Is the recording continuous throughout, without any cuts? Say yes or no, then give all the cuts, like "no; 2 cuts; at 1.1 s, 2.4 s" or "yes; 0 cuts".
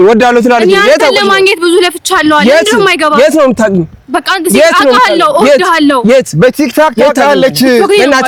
yes; 0 cuts